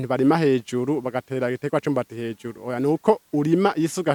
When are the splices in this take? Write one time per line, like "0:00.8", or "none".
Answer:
none